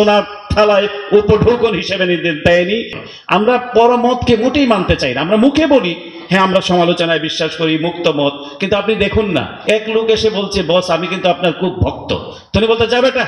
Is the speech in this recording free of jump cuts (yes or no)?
no